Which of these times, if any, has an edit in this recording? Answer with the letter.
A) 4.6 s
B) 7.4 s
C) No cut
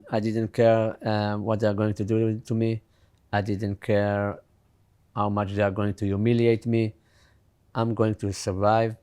B